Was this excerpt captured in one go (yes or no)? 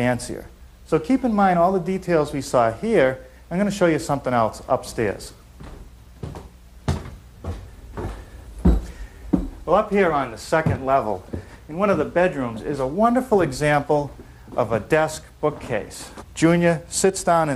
yes